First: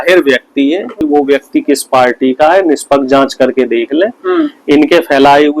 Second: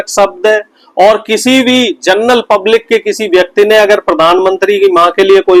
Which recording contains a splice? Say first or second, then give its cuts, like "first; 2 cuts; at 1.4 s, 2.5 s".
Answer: first; 1 cut; at 1.0 s